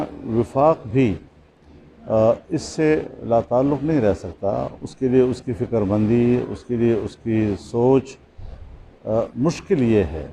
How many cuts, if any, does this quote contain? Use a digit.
0